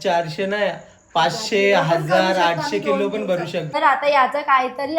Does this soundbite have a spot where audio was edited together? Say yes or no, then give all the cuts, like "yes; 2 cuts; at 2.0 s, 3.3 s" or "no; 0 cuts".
yes; 1 cut; at 3.7 s